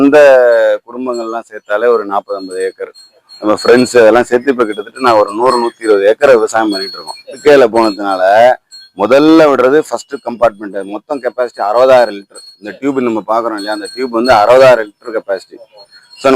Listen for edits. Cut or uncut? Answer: cut